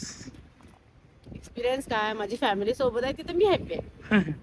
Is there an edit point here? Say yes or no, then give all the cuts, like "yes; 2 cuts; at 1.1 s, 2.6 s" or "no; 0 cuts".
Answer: no; 0 cuts